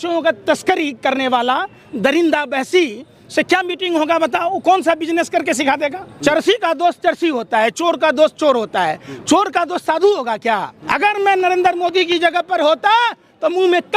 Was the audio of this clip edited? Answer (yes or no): yes